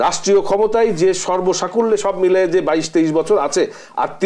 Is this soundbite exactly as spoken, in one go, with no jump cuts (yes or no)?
yes